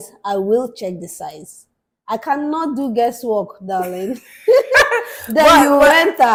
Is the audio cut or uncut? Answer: uncut